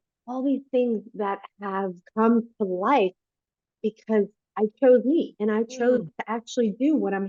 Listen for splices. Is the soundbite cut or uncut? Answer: uncut